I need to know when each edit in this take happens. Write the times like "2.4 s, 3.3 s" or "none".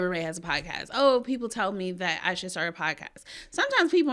none

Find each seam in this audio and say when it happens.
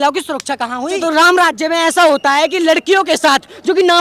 1.0 s

